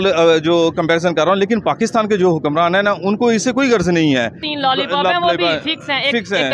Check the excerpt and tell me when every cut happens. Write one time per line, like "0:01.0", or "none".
0:04.5